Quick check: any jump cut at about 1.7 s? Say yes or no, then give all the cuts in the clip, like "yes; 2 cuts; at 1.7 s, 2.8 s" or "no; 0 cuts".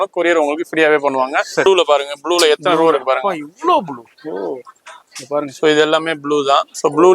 yes; 1 cut; at 1.7 s